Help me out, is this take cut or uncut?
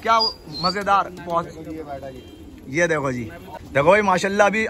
cut